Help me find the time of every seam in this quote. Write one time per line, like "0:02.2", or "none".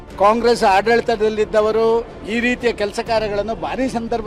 none